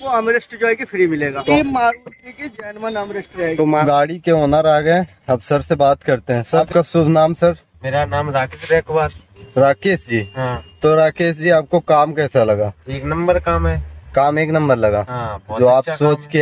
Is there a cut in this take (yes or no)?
yes